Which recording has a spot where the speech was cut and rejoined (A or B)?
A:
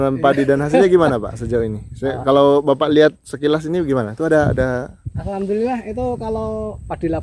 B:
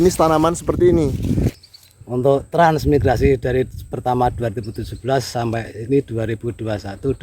B